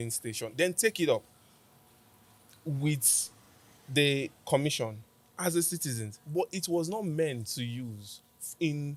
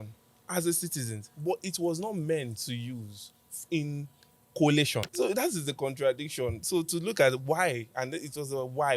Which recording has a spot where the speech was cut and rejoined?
second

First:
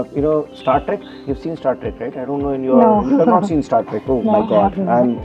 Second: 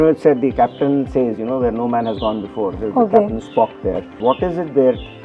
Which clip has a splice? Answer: second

